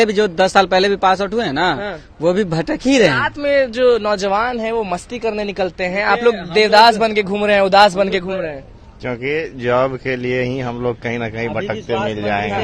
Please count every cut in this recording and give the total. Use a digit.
0